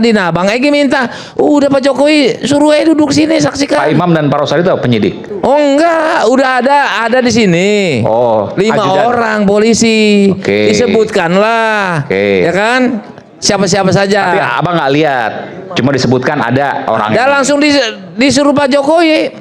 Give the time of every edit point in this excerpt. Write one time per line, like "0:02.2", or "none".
0:05.3